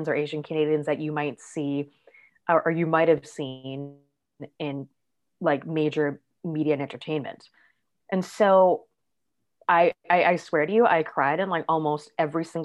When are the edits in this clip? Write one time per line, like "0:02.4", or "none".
none

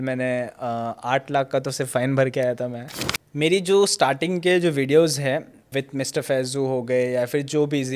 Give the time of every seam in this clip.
0:02.9
0:05.7

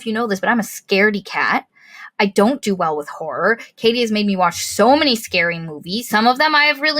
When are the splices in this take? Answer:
0:06.1

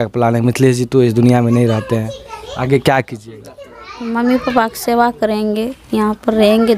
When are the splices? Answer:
none

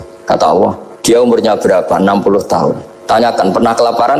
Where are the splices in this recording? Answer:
0:00.9
0:02.9

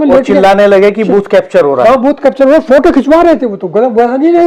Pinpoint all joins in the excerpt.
none

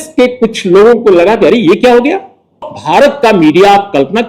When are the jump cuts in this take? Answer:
0:02.6

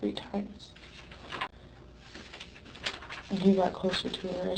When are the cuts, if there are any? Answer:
0:01.5

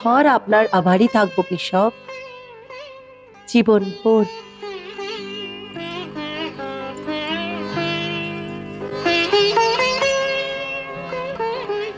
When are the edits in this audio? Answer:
none

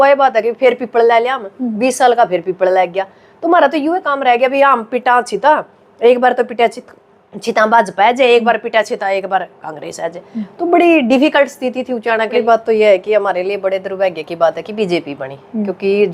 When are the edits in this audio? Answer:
0:12.4

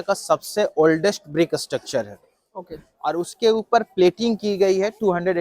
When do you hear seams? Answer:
0:03.0

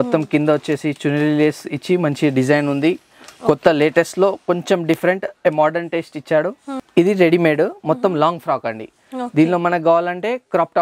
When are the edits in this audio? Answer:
0:06.8

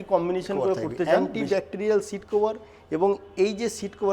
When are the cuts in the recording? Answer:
0:01.3

